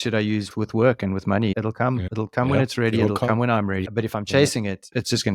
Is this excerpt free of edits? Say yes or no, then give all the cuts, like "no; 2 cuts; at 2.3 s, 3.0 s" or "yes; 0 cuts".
no; 2 cuts; at 2.1 s, 3.8 s